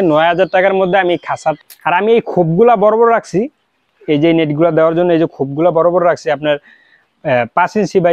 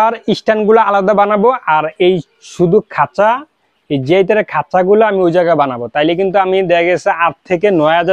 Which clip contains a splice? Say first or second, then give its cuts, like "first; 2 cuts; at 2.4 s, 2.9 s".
first; 1 cut; at 1.6 s